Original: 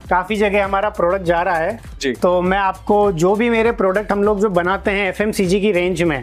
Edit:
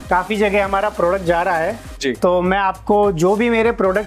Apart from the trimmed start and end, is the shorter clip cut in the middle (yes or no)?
no